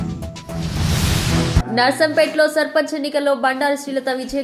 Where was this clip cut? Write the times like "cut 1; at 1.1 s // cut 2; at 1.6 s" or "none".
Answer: none